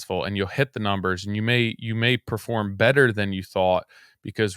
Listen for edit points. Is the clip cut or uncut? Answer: uncut